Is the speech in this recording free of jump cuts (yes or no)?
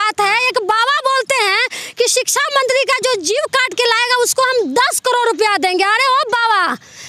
yes